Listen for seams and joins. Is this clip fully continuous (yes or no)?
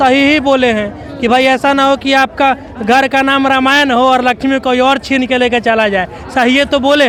yes